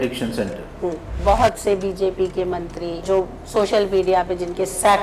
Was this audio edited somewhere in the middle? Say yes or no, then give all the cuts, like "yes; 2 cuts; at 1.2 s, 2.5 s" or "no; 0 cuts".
yes; 2 cuts; at 1.1 s, 3.0 s